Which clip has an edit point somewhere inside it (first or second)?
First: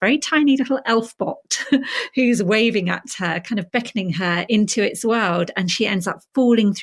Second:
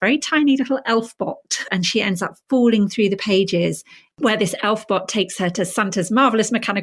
second